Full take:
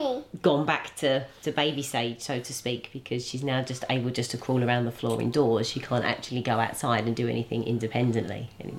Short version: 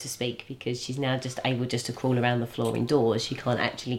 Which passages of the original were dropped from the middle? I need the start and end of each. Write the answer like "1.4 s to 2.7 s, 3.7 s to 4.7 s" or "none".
none

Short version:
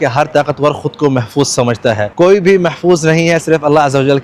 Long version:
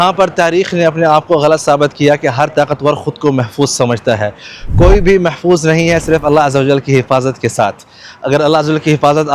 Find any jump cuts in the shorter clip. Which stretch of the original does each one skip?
4.3 s to 4.7 s

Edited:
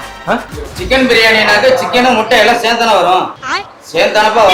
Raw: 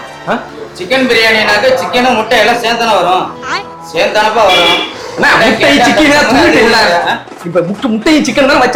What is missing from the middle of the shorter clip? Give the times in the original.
none

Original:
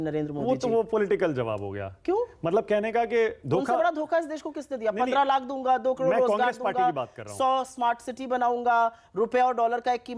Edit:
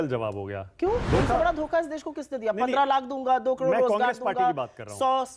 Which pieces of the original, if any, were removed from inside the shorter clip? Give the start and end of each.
2.3 s to 3.4 s

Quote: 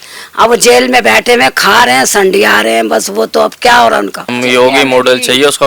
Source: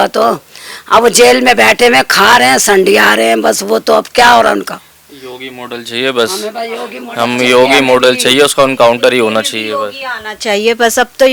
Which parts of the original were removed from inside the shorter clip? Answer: 4.8 s to 7.3 s

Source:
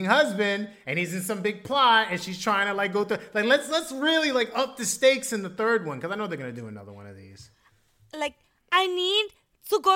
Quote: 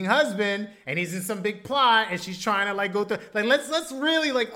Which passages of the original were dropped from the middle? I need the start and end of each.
none

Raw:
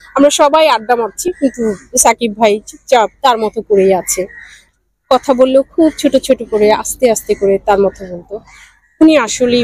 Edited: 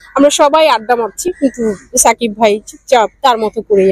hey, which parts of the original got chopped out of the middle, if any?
none

